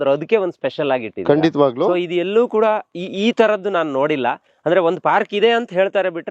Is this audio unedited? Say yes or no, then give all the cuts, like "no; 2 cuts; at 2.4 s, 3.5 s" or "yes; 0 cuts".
yes; 0 cuts